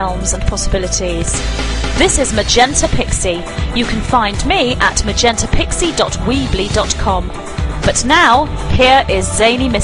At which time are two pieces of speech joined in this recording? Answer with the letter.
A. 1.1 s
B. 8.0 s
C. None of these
B